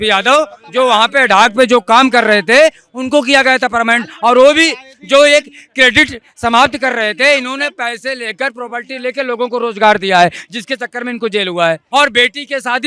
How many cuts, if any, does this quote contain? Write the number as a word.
one